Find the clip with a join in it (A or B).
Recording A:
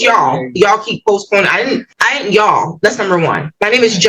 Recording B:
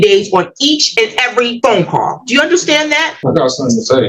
B